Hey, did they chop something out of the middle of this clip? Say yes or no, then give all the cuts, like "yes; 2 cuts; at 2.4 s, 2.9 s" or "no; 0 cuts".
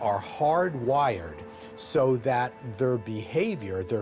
no; 0 cuts